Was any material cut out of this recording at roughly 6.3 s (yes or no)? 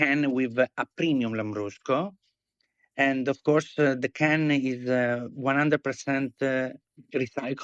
no